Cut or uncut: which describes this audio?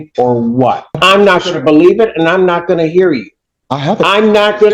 cut